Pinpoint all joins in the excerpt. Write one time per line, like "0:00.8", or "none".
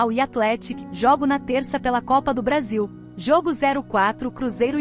0:03.0